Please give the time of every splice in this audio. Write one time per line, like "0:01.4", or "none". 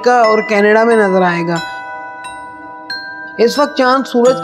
none